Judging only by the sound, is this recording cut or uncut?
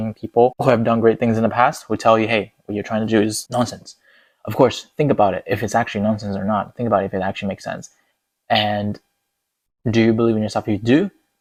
uncut